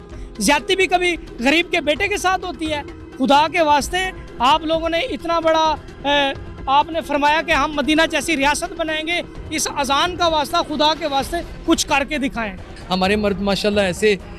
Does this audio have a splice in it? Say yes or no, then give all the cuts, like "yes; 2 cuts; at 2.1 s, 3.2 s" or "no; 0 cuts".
yes; 1 cut; at 12.7 s